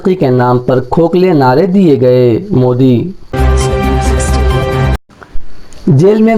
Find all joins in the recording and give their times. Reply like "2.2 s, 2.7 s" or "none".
3.3 s, 5.1 s